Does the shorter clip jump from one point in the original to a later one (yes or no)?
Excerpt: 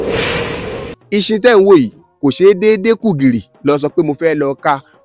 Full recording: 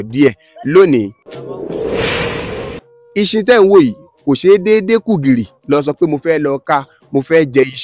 yes